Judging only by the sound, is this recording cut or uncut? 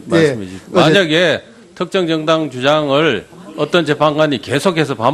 uncut